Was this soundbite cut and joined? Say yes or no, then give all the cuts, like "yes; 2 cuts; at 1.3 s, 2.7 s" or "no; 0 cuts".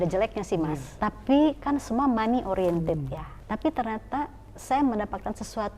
yes; 2 cuts; at 0.9 s, 3.4 s